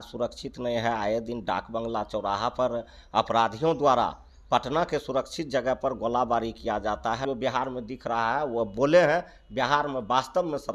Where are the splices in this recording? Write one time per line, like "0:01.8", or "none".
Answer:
0:07.2